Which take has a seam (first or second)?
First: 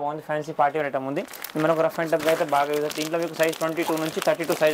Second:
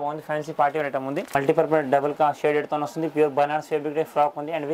second